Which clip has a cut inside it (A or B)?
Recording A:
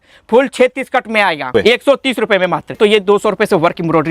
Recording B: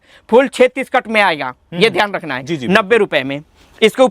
A